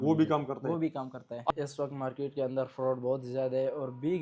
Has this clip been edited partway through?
yes; 1 cut; at 1.5 s

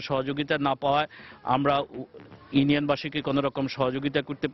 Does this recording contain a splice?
no; 0 cuts

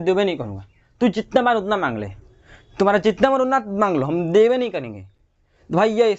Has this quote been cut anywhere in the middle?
no; 0 cuts

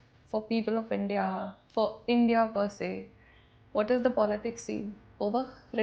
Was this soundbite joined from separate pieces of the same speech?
no; 0 cuts

